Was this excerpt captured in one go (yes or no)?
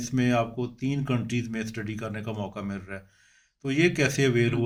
yes